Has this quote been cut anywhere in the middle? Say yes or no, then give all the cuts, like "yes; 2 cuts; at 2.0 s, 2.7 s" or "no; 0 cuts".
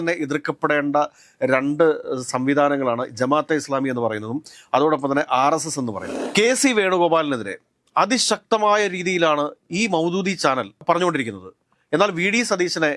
yes; 2 cuts; at 6.1 s, 10.8 s